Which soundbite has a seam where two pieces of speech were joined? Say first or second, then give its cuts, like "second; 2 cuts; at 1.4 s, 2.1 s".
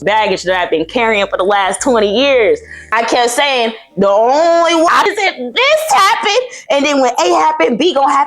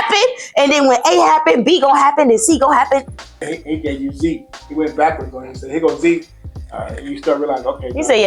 first; 2 cuts; at 2.9 s, 5.1 s